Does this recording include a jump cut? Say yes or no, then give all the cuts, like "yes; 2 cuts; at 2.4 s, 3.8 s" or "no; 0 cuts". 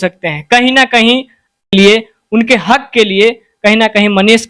yes; 1 cut; at 1.6 s